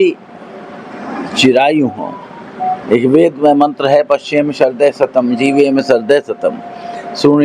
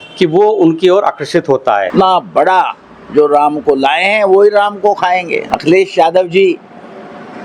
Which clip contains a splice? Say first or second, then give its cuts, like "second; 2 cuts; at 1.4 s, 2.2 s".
second; 2 cuts; at 1.9 s, 5.4 s